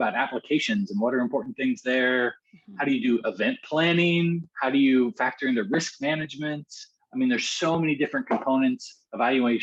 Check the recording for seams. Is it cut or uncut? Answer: uncut